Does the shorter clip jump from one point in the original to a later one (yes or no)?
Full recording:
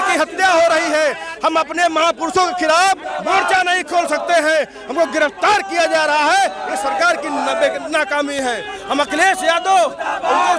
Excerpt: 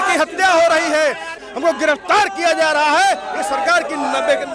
yes